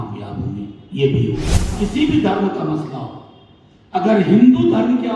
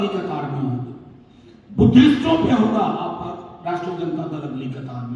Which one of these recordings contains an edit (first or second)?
first